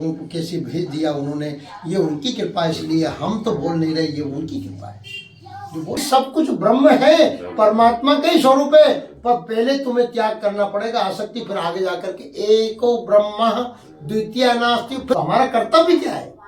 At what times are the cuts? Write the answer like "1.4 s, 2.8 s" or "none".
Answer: 6.0 s, 15.2 s